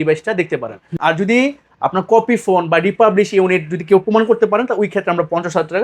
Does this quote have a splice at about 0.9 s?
yes; 1 cut; at 0.9 s

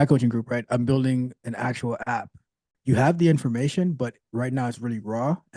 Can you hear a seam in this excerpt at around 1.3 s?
no; 1 cut; at 2.7 s

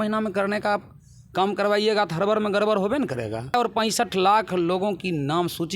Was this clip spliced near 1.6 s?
no; 1 cut; at 3.7 s

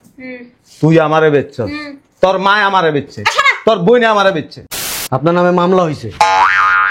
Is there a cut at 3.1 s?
no; 1 cut; at 4.5 s

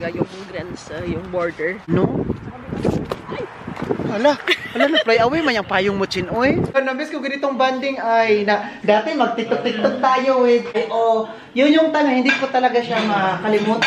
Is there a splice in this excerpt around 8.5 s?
no; 3 cuts; at 1.9 s, 6.8 s, 10.8 s

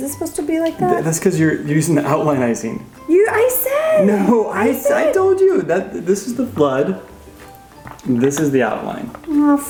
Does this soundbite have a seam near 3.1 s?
no; 0 cuts

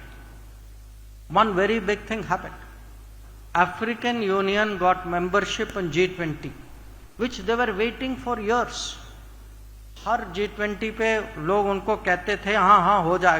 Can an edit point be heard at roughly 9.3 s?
no; 0 cuts

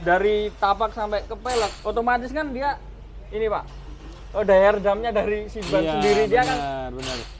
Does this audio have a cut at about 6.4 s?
no; 0 cuts

